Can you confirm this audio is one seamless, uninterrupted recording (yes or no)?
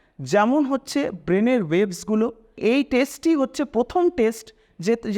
no